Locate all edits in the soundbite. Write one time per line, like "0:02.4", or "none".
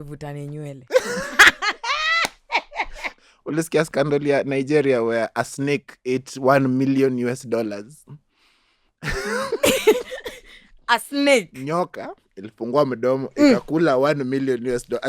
0:03.1